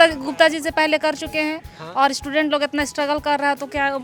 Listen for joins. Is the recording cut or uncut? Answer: uncut